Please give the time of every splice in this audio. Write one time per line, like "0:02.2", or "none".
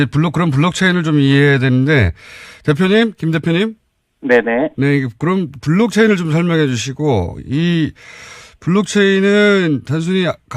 none